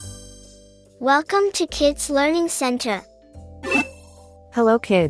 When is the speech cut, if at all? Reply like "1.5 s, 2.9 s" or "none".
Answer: none